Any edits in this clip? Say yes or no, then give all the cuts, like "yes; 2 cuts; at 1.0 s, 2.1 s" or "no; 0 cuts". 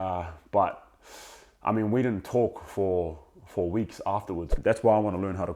yes; 1 cut; at 4.5 s